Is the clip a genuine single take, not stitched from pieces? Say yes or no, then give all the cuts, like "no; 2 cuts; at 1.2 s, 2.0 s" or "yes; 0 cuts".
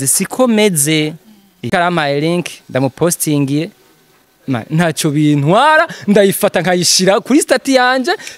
no; 1 cut; at 1.7 s